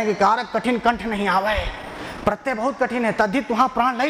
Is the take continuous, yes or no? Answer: yes